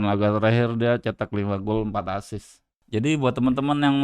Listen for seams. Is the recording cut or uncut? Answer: cut